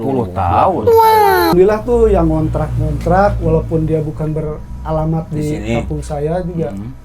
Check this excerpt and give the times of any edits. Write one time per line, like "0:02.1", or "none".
0:01.5